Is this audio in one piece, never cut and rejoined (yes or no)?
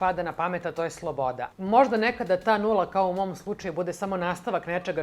no